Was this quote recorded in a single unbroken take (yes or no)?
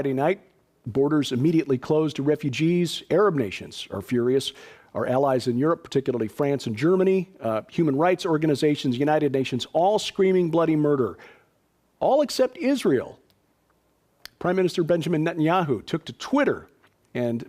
no